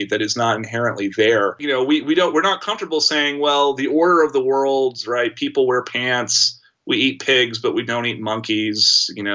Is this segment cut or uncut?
cut